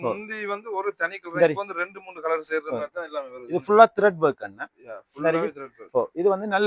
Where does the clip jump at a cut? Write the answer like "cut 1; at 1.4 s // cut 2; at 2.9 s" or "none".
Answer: none